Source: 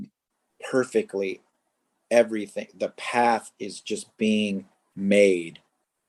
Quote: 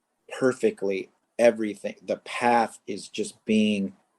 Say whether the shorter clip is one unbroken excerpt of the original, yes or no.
no